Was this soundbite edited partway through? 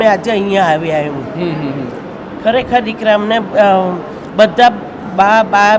no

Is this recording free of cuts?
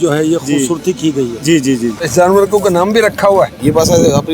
no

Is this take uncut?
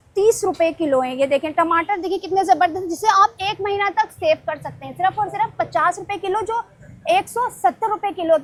yes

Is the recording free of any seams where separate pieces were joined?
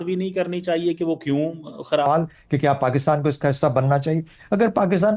no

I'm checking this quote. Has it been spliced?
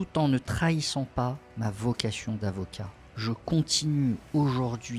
no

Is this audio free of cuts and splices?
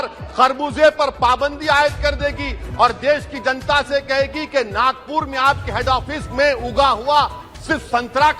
yes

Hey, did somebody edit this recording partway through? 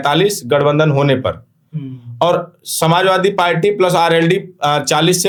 no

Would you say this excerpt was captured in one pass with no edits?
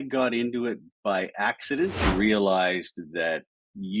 no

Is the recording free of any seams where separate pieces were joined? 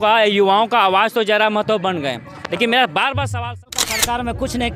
no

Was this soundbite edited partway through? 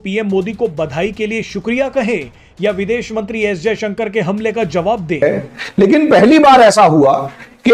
yes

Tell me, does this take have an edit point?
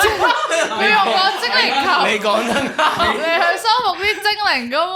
no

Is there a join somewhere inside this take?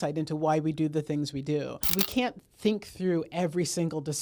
yes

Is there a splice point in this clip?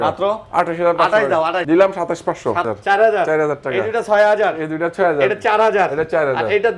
yes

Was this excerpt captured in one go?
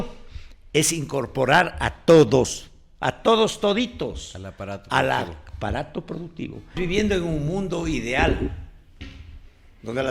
no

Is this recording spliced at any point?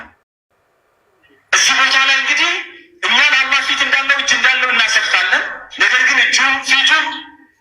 no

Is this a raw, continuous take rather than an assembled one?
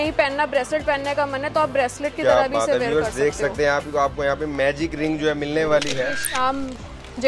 no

